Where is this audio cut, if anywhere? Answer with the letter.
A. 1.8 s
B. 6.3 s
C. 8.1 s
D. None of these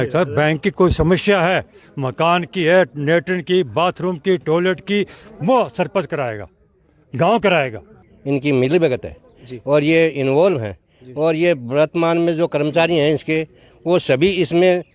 C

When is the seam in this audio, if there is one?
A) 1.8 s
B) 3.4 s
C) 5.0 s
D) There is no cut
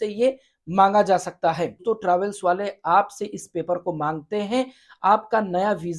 A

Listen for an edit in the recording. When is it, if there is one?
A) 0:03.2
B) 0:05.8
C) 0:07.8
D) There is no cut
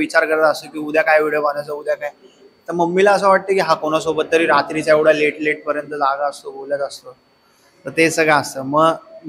D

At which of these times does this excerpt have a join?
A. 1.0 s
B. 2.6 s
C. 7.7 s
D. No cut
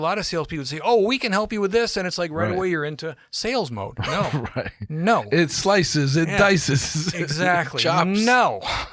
D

